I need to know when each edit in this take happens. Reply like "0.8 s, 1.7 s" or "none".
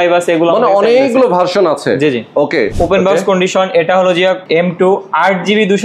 2.7 s, 4.4 s